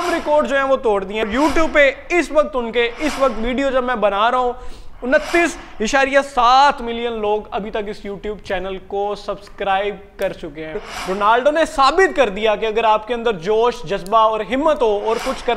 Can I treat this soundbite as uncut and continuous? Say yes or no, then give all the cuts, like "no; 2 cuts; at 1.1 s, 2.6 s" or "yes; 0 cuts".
no; 2 cuts; at 1.3 s, 10.8 s